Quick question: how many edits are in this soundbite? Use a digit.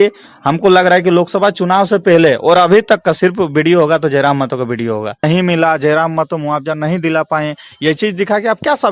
1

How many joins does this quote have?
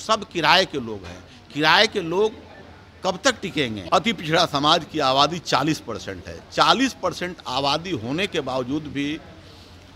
1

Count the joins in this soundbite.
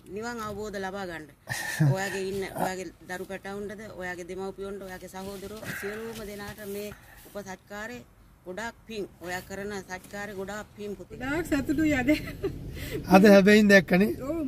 1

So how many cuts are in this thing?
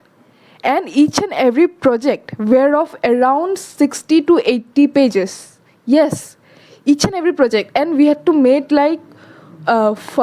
0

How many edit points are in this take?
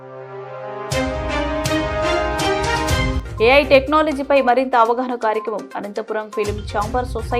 1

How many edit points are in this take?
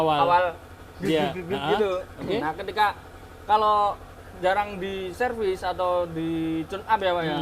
0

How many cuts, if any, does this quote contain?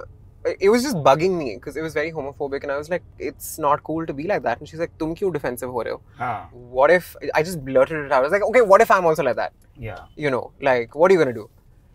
1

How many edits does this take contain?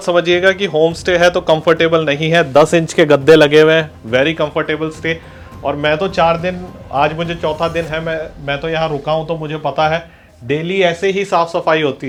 0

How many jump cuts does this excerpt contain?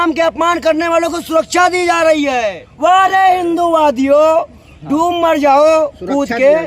1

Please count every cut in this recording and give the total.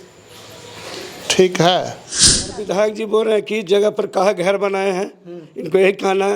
1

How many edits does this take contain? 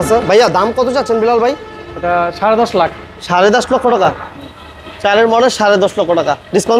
0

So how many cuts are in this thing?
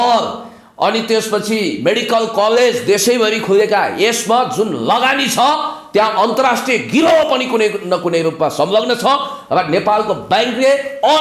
0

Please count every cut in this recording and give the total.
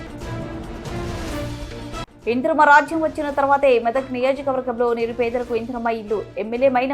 1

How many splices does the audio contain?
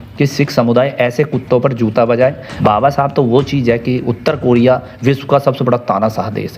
1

